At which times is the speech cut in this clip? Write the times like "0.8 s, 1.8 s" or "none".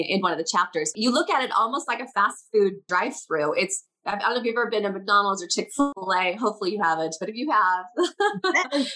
0.9 s, 2.9 s, 5.9 s